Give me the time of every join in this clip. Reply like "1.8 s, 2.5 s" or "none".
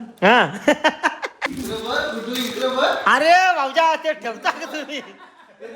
1.4 s